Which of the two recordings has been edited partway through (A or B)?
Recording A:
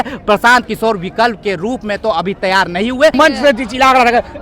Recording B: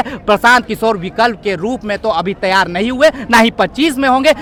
A